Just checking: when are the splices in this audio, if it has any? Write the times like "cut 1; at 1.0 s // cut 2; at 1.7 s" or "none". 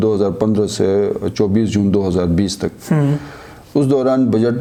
none